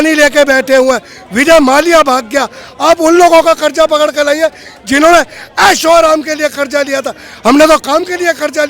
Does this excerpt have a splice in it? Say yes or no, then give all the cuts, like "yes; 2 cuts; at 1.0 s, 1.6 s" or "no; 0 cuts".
no; 0 cuts